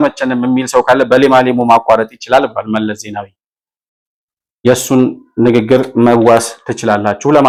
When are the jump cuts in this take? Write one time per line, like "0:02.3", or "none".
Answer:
none

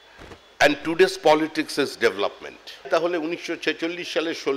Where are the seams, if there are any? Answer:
0:02.9

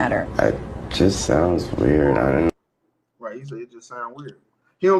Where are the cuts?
none

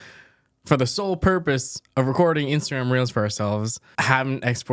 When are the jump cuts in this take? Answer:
0:03.8

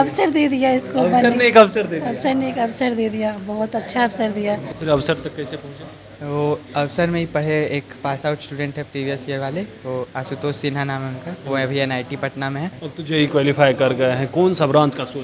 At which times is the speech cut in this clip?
0:04.7
0:12.8

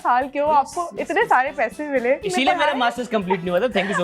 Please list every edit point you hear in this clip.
0:02.3

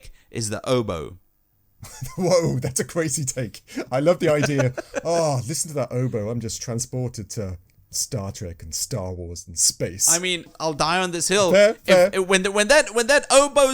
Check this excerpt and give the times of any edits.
0:10.5

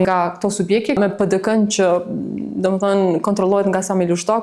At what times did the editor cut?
0:00.9

